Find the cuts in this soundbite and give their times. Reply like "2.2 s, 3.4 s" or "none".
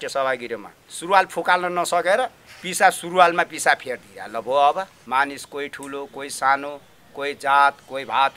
5.0 s